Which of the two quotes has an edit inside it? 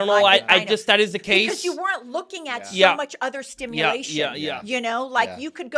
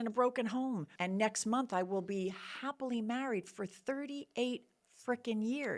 second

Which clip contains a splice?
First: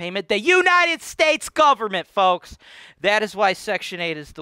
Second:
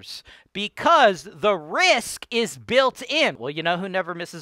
second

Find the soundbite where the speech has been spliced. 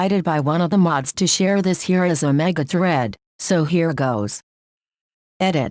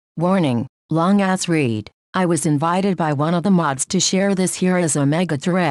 second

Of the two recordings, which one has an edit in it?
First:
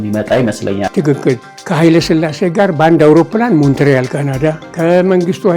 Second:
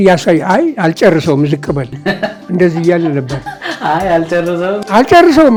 first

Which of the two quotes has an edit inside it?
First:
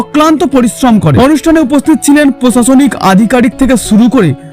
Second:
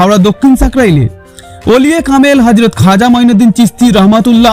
first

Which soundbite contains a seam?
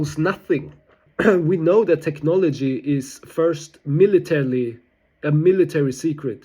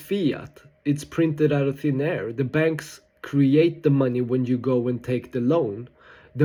first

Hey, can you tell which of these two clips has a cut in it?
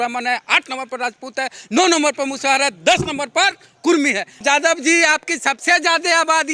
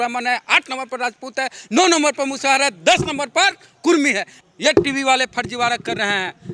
first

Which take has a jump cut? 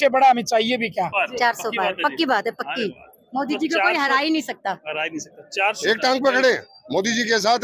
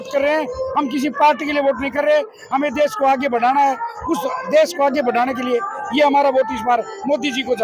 first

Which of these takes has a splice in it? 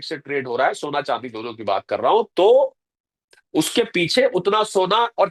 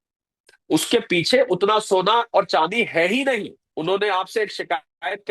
second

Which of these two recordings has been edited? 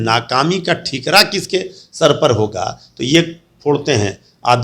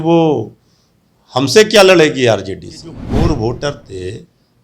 second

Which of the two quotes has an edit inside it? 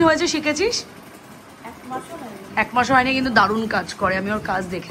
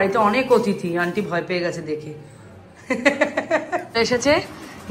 second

